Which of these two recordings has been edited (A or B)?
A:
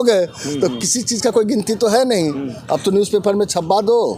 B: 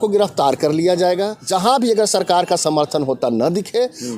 B